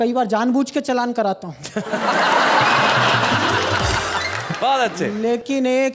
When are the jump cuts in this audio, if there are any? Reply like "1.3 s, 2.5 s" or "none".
none